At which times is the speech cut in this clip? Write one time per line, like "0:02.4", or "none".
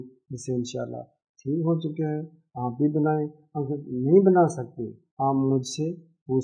none